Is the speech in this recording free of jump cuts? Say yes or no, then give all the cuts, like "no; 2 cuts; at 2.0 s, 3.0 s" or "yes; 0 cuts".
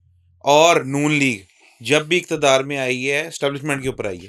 yes; 0 cuts